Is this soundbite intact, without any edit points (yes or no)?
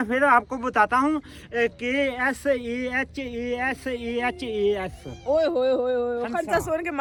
yes